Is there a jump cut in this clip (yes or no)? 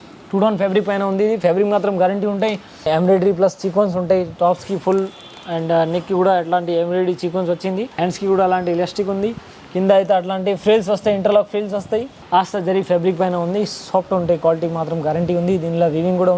yes